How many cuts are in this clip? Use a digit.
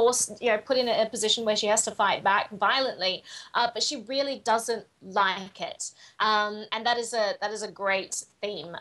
1